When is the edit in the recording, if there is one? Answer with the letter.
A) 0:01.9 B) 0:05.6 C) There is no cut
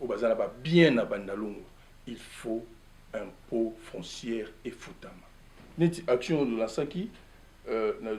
B